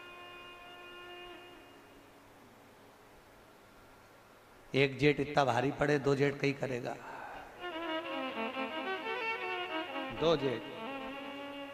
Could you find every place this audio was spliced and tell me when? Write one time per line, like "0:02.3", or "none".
none